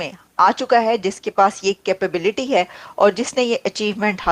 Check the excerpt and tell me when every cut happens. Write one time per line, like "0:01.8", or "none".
none